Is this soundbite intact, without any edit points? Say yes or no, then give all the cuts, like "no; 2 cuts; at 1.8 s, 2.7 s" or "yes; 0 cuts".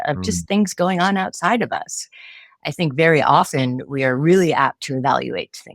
yes; 0 cuts